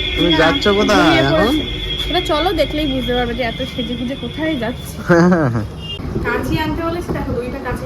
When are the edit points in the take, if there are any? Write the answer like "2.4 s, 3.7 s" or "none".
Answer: 5.9 s